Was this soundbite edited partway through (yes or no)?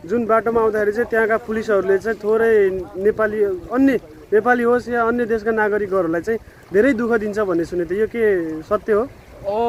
no